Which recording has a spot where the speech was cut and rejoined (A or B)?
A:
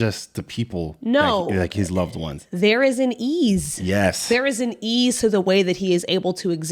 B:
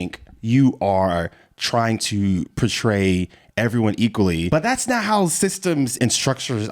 B